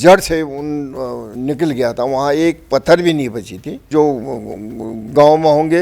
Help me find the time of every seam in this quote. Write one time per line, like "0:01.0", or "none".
0:03.9